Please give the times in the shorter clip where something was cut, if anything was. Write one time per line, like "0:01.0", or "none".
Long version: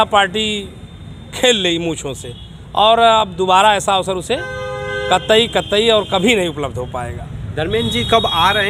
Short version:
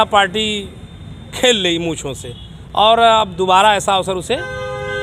none